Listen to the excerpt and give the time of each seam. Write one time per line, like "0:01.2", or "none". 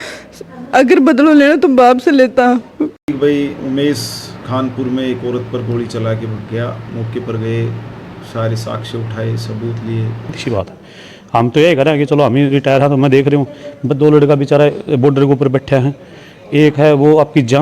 0:03.0
0:10.4